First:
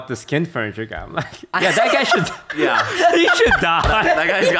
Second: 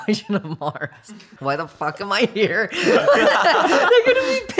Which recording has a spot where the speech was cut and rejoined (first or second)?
second